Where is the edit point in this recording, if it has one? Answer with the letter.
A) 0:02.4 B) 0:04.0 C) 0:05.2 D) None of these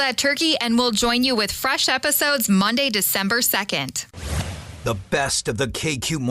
B